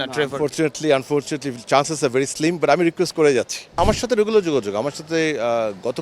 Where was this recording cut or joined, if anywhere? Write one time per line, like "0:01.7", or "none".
0:03.8